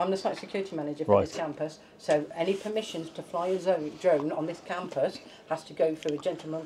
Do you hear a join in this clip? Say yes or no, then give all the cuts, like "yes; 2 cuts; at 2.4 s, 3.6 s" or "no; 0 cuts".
no; 0 cuts